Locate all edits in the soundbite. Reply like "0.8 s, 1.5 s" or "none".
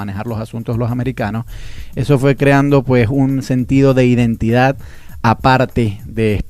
5.5 s